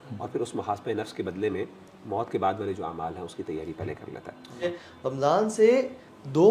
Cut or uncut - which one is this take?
cut